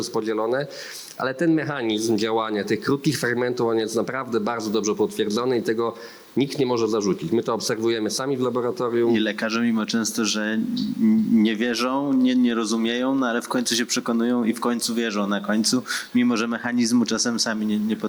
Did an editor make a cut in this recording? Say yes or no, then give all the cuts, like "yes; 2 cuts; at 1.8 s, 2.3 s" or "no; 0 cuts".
no; 0 cuts